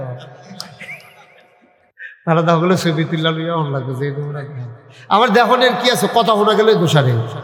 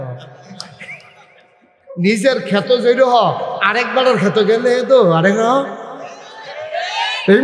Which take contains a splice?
second; 1 cut; at 1.8 s

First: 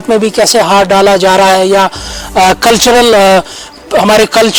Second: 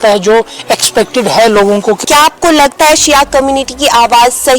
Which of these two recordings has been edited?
second; 1 cut; at 2.0 s

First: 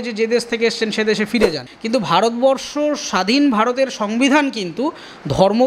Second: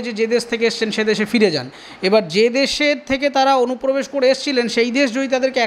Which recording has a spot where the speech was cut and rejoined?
first; 1 cut; at 1.7 s

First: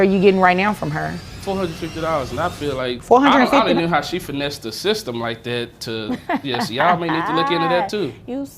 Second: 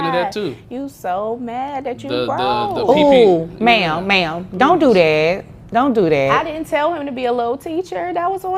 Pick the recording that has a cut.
first; 2 cuts; at 1.3 s, 3.0 s

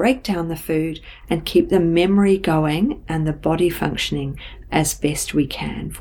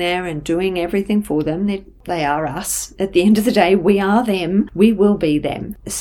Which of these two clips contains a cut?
second; 1 cut; at 4.7 s

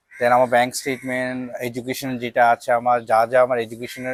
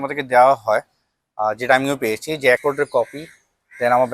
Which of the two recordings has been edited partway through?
second; 1 cut; at 2.6 s

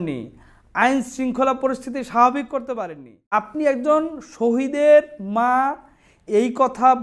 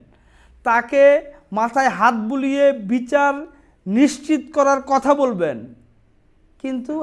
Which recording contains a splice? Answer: first; 1 cut; at 3.1 s

